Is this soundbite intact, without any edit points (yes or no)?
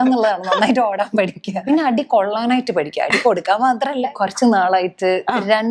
no